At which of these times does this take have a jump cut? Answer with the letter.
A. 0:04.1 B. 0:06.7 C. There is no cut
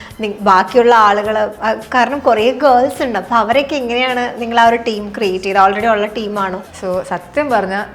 B